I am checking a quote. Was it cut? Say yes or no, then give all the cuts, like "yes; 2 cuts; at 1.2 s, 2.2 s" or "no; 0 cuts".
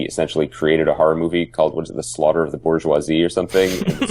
no; 0 cuts